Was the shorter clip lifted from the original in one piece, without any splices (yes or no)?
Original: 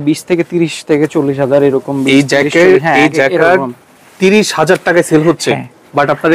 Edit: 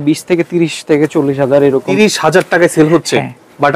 no